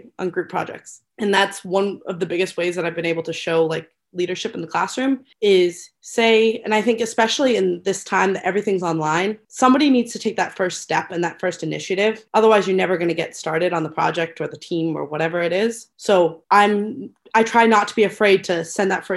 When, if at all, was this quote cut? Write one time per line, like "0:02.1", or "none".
none